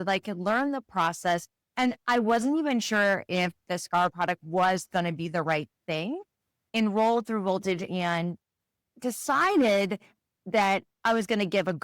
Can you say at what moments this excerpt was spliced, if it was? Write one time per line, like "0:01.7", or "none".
0:04.1
0:06.6